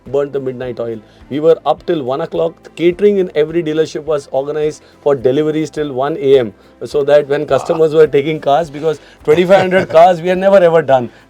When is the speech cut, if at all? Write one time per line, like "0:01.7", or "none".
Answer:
none